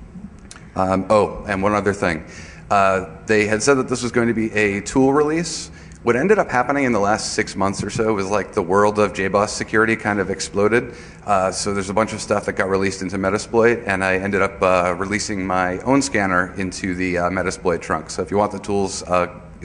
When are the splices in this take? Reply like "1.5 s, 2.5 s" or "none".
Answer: 16.5 s